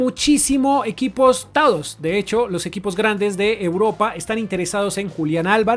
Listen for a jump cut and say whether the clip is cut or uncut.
uncut